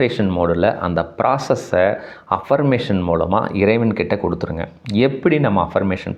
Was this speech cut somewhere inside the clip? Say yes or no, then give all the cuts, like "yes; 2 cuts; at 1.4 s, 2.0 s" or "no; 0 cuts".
no; 0 cuts